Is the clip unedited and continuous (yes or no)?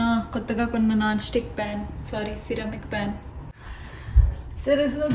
no